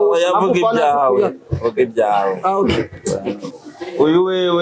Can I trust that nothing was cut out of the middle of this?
no; 1 cut; at 3.5 s

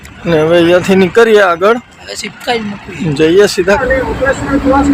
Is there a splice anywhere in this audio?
yes; 1 cut; at 3.8 s

